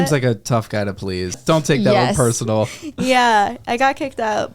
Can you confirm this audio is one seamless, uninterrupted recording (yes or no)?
no